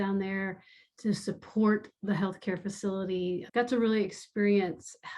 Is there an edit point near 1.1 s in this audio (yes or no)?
no